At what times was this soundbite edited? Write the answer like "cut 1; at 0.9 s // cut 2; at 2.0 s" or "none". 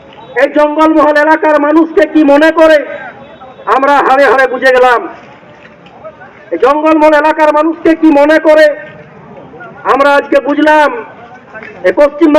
none